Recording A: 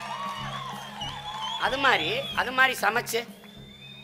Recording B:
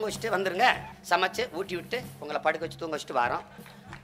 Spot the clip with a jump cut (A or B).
B